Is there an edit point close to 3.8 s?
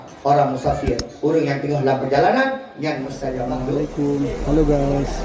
yes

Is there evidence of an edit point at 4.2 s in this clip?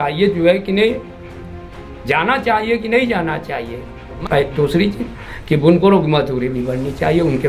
yes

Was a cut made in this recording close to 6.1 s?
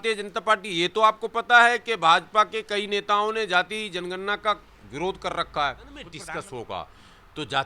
yes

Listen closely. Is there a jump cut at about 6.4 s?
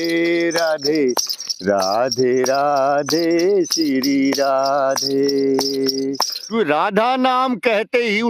yes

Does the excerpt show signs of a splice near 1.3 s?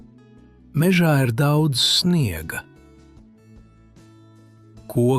no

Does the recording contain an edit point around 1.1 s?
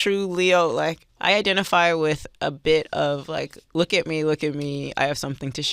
yes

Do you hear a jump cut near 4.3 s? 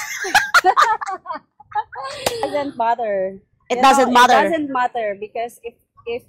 no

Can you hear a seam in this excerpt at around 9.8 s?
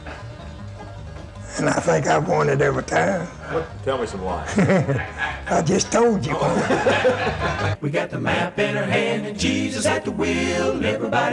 no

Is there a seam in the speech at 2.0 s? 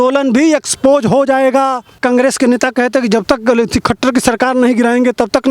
yes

